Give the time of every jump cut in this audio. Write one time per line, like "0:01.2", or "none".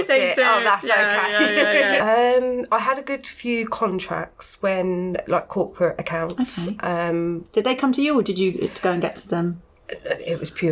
0:02.0